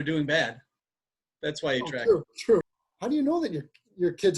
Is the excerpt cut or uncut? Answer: cut